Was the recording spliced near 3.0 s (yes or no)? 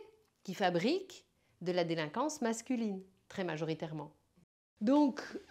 no